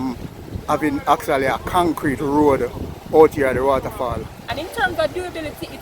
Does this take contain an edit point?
yes; 1 cut; at 4.4 s

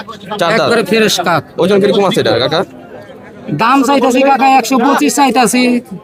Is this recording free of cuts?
yes; 0 cuts

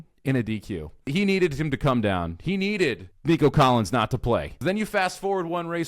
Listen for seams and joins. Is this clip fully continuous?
no; 3 cuts; at 1.1 s, 3.1 s, 4.5 s

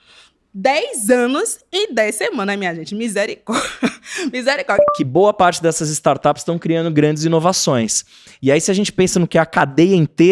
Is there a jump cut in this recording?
yes; 1 cut; at 4.9 s

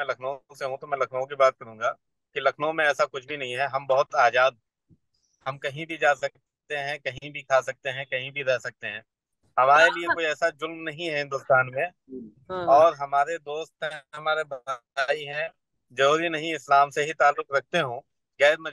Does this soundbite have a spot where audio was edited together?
no; 0 cuts

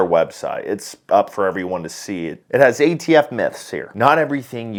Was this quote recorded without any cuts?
yes; 0 cuts

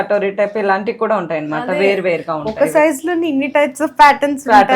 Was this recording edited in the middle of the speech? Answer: no; 0 cuts

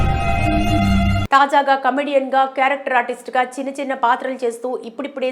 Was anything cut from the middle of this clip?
yes; 1 cut; at 0.9 s

